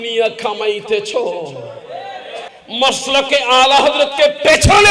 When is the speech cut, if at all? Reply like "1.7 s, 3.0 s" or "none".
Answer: 2.5 s